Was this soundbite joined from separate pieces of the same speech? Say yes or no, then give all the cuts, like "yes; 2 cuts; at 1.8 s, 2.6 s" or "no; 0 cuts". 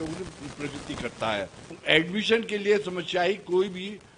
yes; 1 cut; at 1.8 s